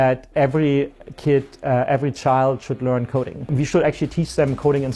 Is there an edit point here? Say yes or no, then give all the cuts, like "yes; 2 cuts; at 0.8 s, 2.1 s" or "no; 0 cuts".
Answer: yes; 1 cut; at 3.4 s